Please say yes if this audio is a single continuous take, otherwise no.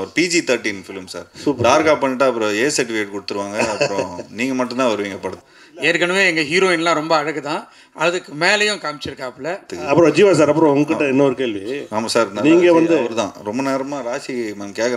no